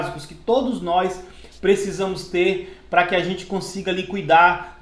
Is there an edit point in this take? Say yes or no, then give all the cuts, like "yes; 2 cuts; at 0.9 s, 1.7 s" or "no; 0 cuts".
no; 0 cuts